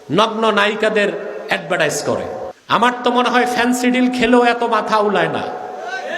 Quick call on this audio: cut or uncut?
cut